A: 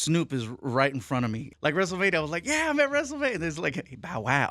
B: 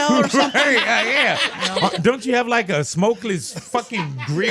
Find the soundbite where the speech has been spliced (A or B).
A